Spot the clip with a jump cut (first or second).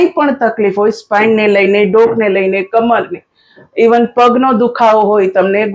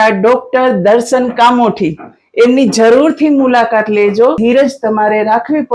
second